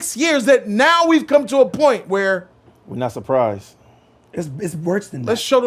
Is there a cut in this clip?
no; 0 cuts

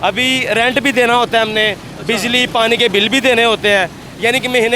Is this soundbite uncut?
yes; 0 cuts

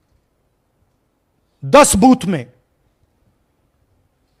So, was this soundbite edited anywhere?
no; 0 cuts

